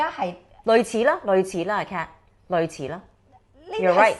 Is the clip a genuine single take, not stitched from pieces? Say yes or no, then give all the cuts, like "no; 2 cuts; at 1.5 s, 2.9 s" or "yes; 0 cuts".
yes; 0 cuts